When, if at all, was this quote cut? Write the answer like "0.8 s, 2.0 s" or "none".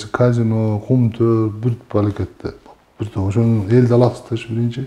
none